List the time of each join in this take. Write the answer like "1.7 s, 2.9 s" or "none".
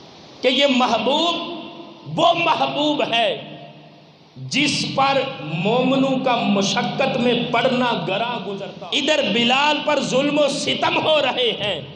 8.5 s